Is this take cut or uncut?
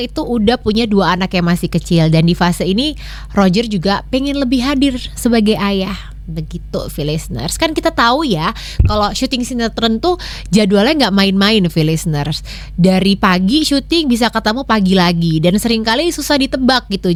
uncut